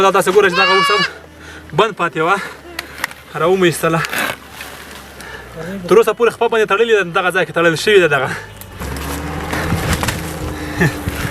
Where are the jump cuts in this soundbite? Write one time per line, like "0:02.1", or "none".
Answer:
0:08.7